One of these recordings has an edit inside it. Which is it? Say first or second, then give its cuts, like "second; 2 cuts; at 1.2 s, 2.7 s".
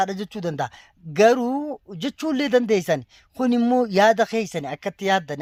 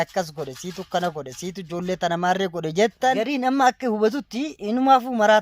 second; 1 cut; at 3.3 s